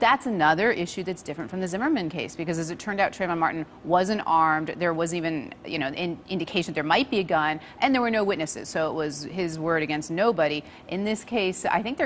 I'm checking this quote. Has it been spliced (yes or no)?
no